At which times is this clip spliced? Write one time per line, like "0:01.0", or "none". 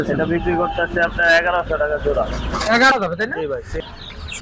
0:02.9